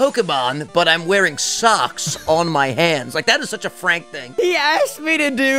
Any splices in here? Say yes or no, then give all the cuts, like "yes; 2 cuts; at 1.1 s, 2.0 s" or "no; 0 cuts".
yes; 1 cut; at 4.3 s